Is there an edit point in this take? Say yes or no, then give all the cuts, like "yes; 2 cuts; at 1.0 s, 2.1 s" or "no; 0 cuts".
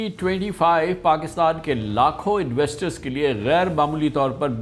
no; 0 cuts